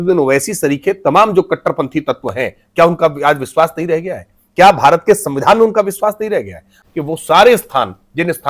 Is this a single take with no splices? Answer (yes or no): no